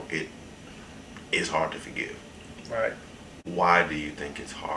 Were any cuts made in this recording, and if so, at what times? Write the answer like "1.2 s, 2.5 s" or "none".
none